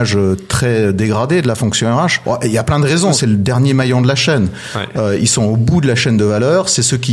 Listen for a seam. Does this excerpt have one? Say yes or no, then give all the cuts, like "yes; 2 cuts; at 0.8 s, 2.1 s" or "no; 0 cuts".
yes; 2 cuts; at 2.2 s, 3.2 s